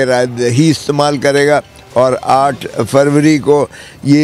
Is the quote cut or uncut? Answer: uncut